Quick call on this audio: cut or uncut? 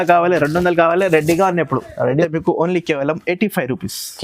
cut